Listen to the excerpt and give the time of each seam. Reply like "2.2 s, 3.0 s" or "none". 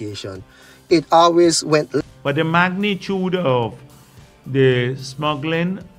2.0 s